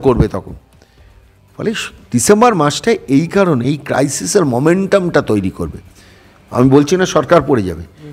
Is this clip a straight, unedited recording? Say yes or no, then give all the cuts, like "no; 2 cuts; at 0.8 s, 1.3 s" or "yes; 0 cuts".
yes; 0 cuts